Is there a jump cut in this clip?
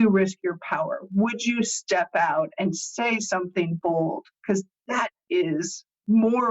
yes; 1 cut; at 4.3 s

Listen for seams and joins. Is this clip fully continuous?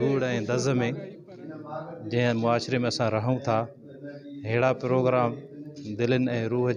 yes; 0 cuts

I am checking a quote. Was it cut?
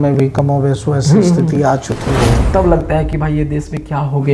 yes; 1 cut; at 2.4 s

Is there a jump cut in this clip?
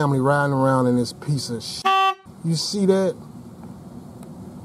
no; 0 cuts

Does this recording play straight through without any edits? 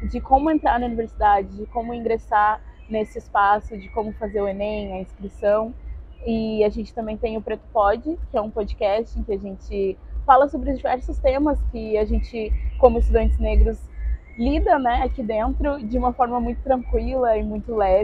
yes; 0 cuts

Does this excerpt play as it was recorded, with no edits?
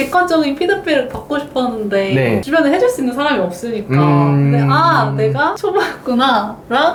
yes; 0 cuts

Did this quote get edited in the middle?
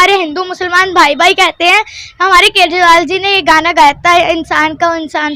no; 0 cuts

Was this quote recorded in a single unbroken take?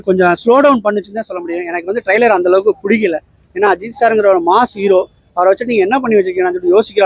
yes; 0 cuts

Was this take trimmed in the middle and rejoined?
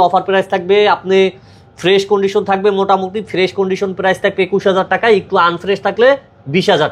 no; 0 cuts

